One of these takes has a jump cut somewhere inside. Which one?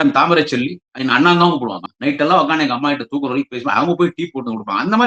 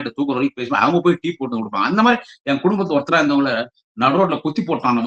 first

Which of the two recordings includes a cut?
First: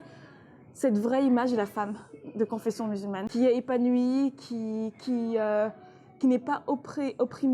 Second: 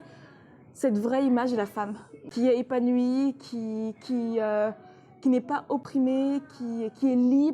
second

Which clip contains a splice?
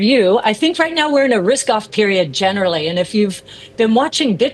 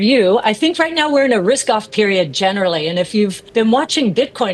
second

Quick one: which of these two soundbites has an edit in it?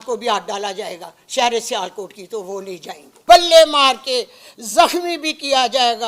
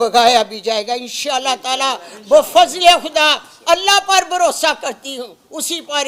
first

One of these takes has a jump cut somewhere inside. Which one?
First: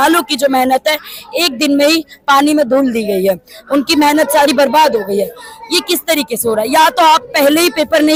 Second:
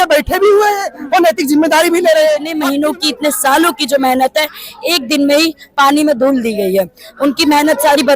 second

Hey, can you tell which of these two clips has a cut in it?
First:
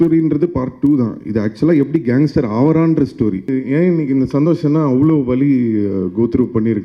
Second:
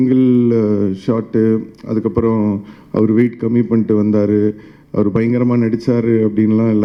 first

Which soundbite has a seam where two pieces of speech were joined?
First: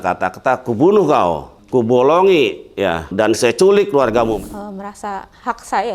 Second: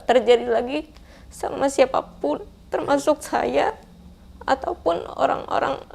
first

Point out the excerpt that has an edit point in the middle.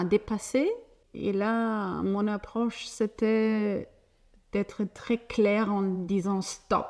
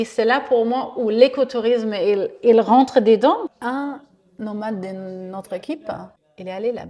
second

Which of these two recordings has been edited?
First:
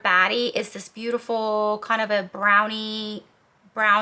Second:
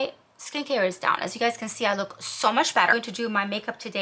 second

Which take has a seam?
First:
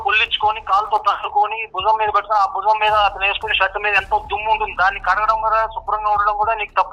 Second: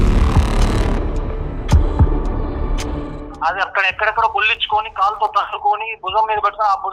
second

